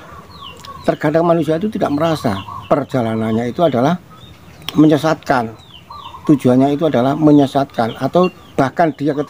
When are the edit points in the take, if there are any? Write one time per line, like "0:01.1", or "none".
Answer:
0:02.9